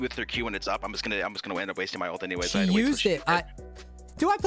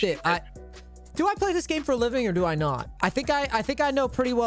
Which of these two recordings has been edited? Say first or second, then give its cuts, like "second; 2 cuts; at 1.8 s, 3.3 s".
second; 1 cut; at 2.9 s